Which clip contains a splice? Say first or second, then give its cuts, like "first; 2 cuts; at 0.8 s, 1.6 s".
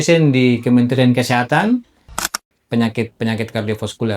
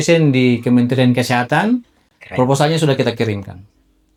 first; 1 cut; at 2.1 s